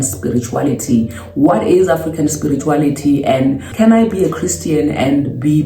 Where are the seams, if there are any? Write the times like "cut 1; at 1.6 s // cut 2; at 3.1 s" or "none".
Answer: cut 1; at 3.7 s